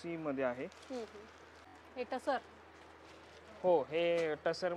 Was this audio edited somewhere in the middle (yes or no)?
no